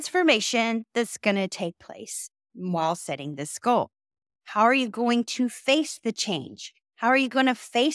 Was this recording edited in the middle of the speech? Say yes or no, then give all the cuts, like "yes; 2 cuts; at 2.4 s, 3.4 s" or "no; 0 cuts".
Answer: no; 0 cuts